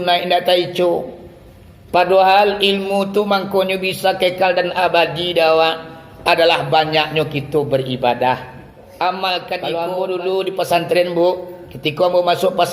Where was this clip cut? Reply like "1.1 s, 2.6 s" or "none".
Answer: 9.6 s